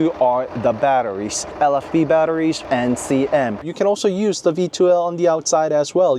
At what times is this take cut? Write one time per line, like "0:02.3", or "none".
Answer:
0:01.5
0:02.6
0:03.6

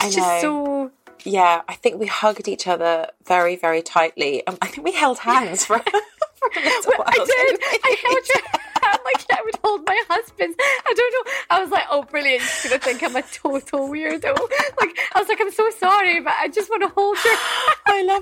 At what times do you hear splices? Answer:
none

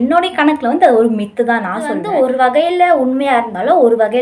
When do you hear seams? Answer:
0:02.0

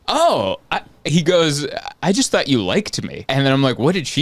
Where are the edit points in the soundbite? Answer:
0:03.2

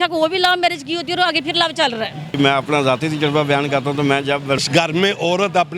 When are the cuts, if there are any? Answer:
0:02.4
0:04.6

